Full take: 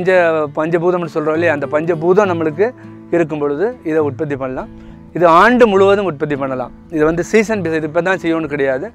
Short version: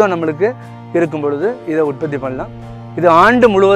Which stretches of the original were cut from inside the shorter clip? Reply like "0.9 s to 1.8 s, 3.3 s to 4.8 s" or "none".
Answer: none